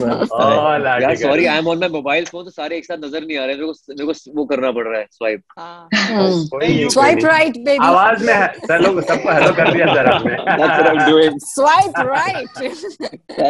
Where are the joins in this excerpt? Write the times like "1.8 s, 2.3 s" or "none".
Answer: none

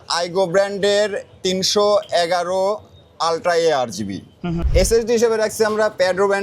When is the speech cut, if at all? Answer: 4.6 s

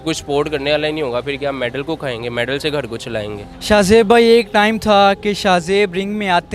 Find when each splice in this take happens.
none

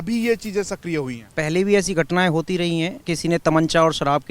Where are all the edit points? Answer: 1.3 s, 3.1 s

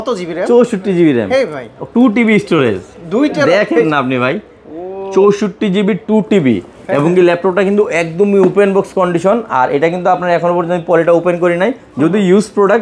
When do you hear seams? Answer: none

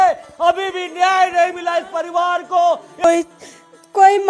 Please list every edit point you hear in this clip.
3.0 s

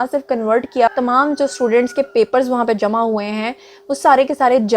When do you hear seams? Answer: 0.9 s

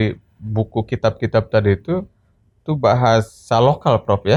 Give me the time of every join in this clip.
none

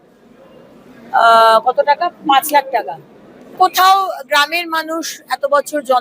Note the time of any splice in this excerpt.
3.5 s

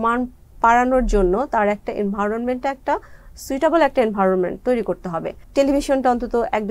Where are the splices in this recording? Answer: 5.4 s

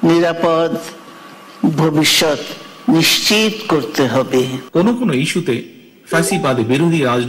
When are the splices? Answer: 4.6 s

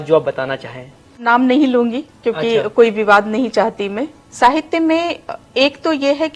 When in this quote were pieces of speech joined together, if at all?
1.2 s, 4.2 s

